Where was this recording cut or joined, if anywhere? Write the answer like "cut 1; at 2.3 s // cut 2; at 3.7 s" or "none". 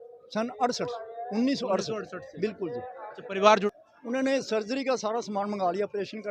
cut 1; at 3.6 s

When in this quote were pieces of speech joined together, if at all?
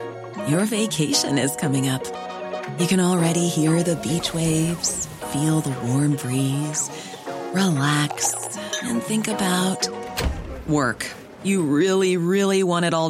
none

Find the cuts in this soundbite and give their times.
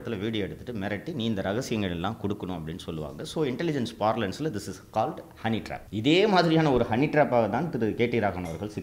cut 1; at 5.8 s

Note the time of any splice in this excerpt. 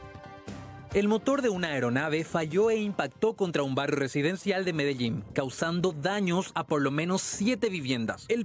cut 1; at 0.9 s

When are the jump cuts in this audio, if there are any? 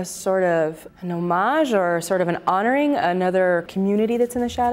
cut 1; at 0.9 s // cut 2; at 3.7 s

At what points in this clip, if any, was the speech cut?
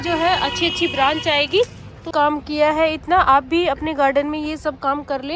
cut 1; at 2.1 s

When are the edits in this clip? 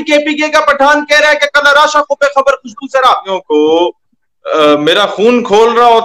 cut 1; at 3.2 s

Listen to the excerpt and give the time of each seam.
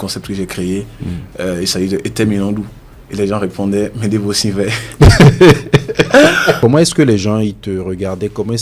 cut 1; at 6.6 s

